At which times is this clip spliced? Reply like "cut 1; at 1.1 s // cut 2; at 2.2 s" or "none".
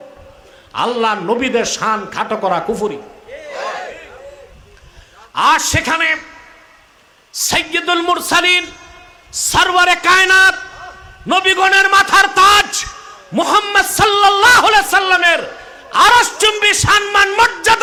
none